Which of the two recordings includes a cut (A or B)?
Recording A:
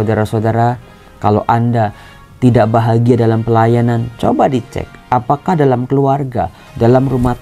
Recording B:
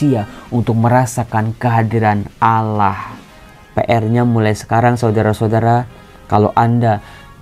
B